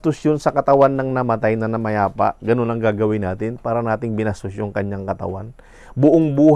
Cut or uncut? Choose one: uncut